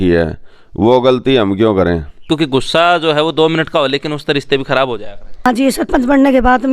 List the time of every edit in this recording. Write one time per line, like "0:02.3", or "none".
0:02.2
0:05.5